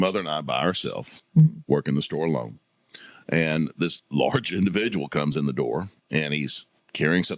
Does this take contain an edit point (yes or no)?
no